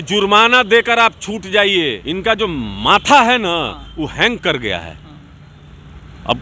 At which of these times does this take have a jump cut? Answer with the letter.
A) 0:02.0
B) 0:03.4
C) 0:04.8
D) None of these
A